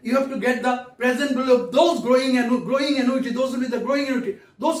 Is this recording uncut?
yes; 0 cuts

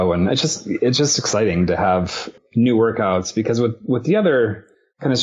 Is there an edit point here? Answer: yes; 1 cut; at 2.3 s

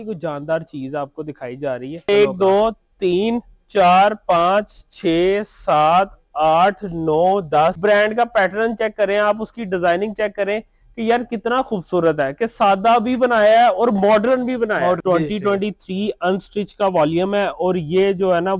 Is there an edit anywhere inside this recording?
yes; 3 cuts; at 2.1 s, 7.8 s, 15.0 s

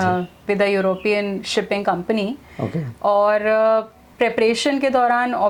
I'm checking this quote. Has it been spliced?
no; 0 cuts

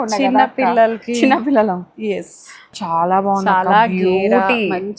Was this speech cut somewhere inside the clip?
yes; 1 cut; at 2.8 s

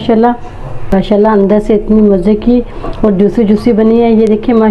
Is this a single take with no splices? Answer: no; 1 cut; at 0.9 s

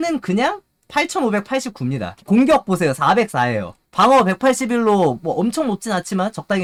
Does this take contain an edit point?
no; 0 cuts

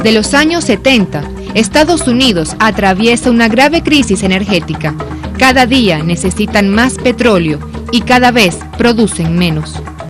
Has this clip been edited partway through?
yes; 1 cut; at 5.3 s

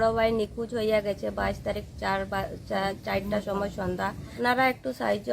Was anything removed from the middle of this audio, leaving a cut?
yes; 1 cut; at 4.4 s

